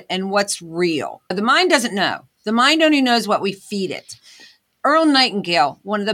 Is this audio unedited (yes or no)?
yes